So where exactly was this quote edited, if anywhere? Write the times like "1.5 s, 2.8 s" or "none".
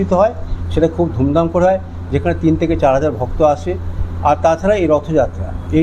none